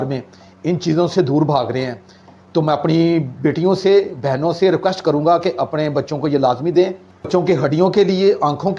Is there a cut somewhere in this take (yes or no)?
yes